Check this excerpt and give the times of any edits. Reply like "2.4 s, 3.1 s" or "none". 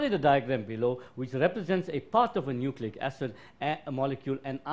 3.8 s